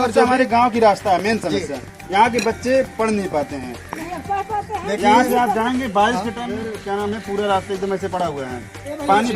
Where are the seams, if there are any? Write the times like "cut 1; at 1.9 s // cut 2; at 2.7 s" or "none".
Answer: cut 1; at 6.4 s